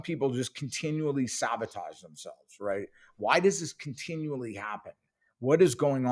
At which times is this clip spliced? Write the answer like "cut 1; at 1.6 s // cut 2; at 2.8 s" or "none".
none